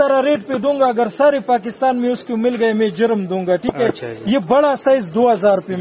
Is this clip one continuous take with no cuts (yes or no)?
yes